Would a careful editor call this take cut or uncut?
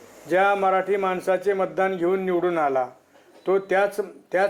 uncut